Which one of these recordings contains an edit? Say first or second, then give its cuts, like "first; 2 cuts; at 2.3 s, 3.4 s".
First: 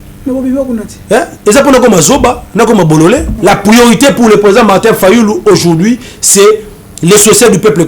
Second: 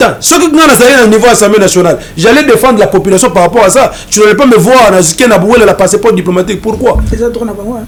first; 1 cut; at 3.3 s